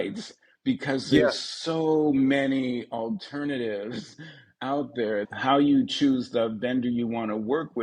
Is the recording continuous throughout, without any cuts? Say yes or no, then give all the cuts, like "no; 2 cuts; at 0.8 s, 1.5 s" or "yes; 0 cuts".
no; 1 cut; at 5.3 s